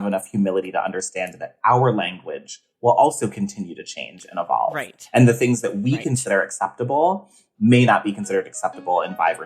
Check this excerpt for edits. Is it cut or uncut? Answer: cut